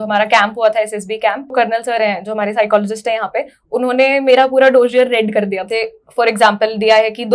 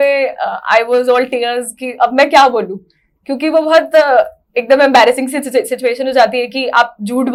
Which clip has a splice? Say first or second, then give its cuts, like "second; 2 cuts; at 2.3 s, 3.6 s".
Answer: first; 2 cuts; at 1.5 s, 5.6 s